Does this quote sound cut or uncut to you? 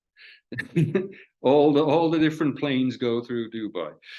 uncut